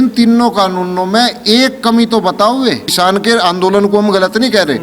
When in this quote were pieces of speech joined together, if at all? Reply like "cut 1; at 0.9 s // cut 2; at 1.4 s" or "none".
cut 1; at 2.9 s